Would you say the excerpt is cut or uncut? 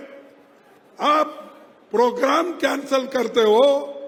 uncut